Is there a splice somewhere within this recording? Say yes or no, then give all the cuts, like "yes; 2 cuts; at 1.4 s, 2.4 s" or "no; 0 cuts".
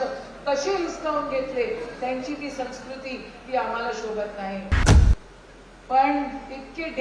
yes; 1 cut; at 4.9 s